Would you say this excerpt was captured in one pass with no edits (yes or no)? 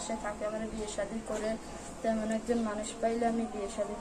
yes